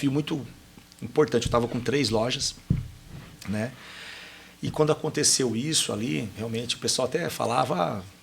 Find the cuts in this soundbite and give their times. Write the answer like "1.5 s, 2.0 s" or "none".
6.4 s